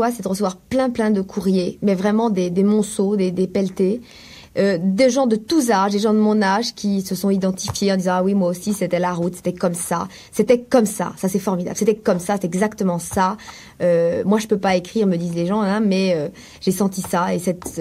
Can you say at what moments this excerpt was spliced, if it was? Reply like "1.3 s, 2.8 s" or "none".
none